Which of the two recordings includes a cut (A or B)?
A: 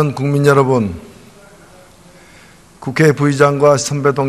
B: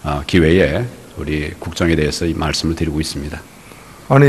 B